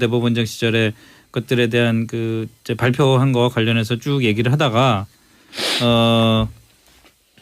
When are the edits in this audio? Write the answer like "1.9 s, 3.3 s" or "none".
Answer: 5.5 s